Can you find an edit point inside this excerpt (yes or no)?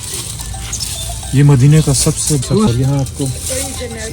yes